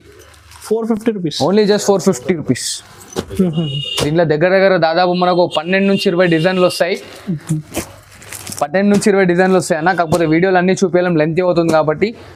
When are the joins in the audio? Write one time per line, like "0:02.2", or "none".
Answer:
none